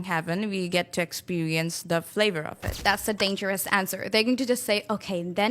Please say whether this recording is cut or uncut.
cut